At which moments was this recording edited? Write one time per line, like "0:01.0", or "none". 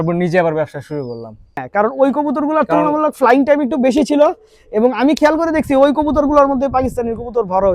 0:01.6